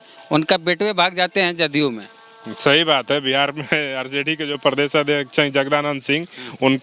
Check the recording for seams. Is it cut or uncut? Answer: uncut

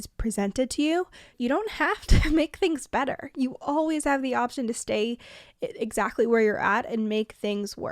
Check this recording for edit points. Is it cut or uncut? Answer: cut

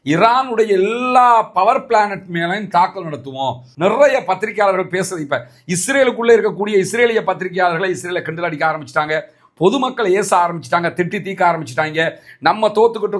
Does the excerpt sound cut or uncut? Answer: cut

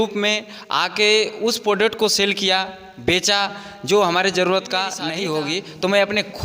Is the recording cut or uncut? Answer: cut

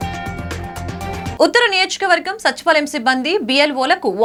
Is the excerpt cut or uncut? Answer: uncut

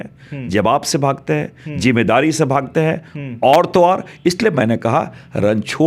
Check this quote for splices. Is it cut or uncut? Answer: uncut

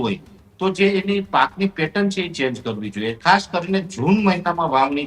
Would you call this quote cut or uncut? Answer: cut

